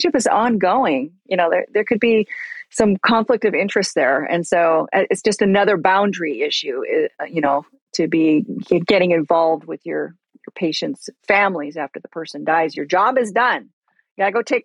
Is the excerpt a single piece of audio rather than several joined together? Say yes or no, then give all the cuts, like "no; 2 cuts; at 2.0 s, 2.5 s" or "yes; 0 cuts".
yes; 0 cuts